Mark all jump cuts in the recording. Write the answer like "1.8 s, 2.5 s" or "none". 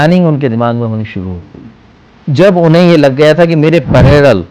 2.1 s